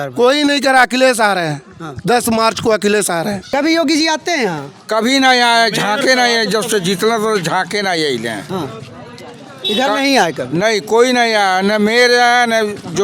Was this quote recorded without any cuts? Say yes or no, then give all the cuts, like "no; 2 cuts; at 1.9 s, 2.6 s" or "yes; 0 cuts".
no; 1 cut; at 3.4 s